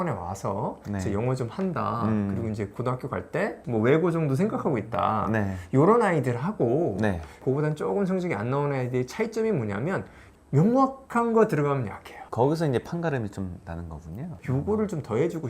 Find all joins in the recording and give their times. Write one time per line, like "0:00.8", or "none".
0:10.2
0:14.3